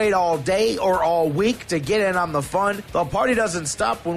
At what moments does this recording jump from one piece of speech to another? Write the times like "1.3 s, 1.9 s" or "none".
none